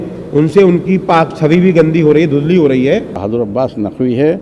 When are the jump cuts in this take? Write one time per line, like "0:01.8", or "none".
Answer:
0:03.2